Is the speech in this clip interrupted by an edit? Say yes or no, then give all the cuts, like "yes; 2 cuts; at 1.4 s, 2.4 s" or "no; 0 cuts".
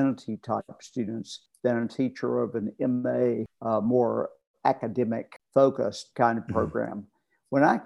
yes; 3 cuts; at 1.4 s, 3.5 s, 5.3 s